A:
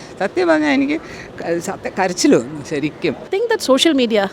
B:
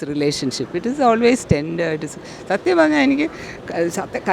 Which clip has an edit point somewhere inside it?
A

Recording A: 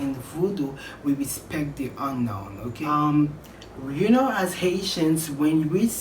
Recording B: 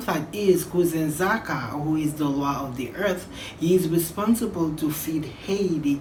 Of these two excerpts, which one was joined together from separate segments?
A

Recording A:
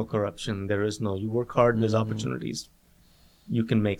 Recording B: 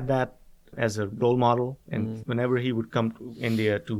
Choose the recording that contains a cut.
B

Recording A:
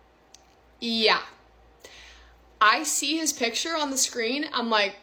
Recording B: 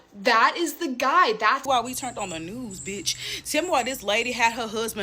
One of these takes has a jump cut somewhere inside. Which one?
B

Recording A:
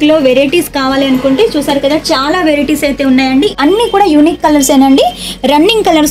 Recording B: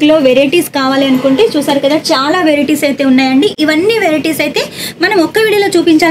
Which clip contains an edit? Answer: A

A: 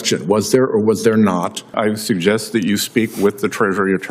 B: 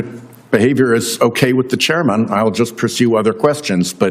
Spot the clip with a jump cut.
A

